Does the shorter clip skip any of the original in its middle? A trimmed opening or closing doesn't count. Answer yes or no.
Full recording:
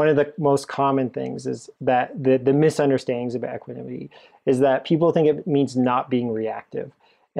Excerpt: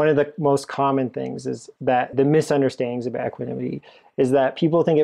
yes